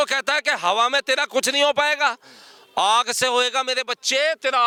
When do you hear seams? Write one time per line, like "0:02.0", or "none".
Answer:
none

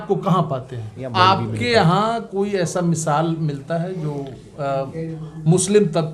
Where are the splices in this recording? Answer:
0:01.0

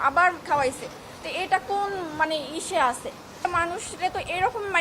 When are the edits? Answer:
0:03.4

